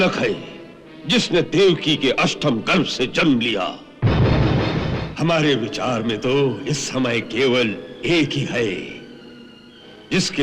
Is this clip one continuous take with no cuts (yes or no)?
no